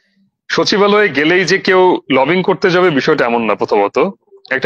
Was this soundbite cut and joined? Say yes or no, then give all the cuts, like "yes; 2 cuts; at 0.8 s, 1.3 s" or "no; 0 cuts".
no; 0 cuts